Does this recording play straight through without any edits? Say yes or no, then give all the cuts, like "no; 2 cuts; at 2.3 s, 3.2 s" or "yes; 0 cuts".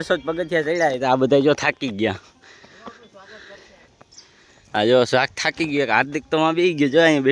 yes; 0 cuts